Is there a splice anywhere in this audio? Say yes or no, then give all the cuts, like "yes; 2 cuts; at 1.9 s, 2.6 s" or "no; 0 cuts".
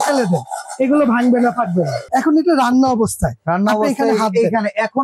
yes; 1 cut; at 2.0 s